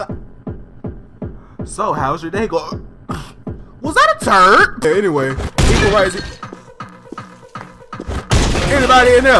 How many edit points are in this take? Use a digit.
1